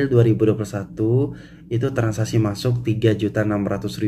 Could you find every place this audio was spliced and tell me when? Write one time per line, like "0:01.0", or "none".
none

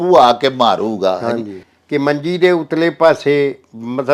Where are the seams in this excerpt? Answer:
0:01.7

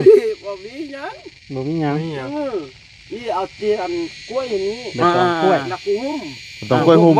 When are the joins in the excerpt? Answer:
none

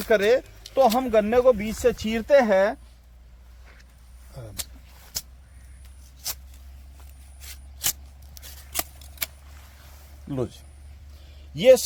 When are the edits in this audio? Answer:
none

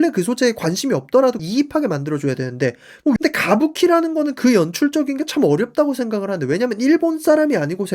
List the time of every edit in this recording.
0:01.4
0:03.2

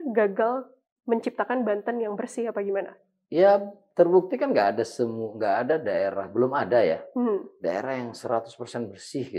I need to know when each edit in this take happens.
none

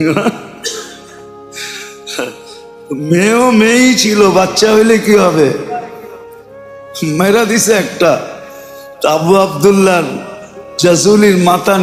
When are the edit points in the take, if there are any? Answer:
none

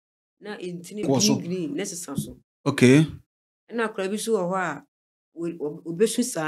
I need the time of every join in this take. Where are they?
0:01.0

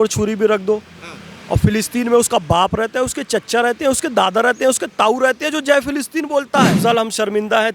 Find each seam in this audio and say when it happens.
0:06.8

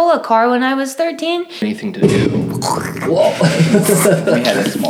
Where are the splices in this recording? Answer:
0:01.6

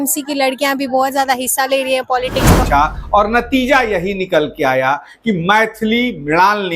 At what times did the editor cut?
0:02.7

